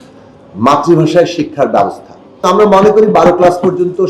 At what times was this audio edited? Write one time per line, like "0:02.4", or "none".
0:02.4